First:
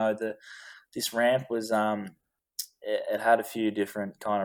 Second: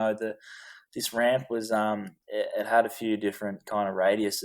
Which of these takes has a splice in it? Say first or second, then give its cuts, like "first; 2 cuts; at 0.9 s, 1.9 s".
second; 1 cut; at 2.2 s